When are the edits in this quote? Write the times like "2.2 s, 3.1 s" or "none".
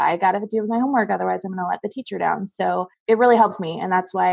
2.9 s